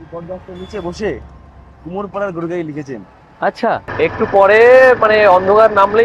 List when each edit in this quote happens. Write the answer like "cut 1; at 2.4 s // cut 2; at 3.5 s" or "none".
cut 1; at 3.9 s

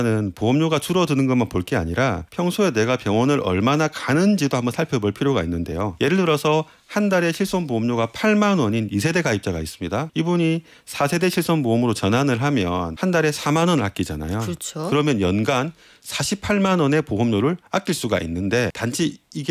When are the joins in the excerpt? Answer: cut 1; at 2.3 s // cut 2; at 5.9 s // cut 3; at 10.1 s // cut 4; at 12.9 s // cut 5; at 18.8 s

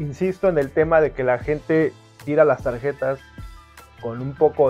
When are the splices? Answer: none

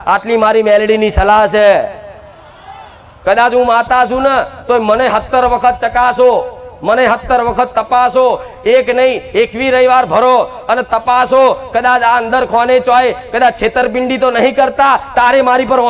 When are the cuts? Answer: none

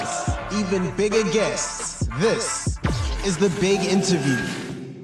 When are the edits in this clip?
none

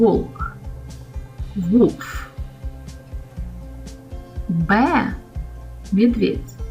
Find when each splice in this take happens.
cut 1; at 2.1 s // cut 2; at 4.0 s

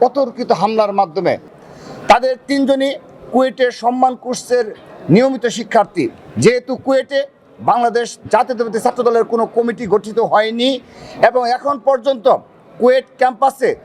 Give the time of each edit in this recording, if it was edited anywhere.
cut 1; at 1.5 s

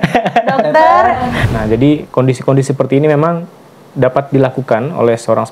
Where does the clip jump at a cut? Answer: cut 1; at 1.3 s

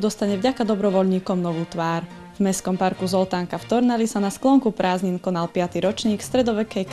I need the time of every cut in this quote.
cut 1; at 2.1 s

